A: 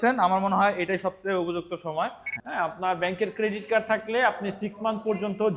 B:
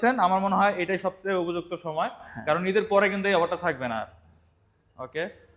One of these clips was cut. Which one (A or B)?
A